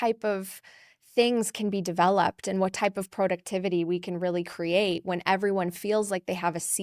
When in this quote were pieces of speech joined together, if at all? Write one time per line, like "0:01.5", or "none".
none